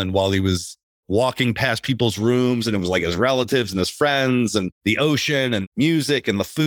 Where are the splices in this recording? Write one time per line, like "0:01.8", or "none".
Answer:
0:04.7
0:05.7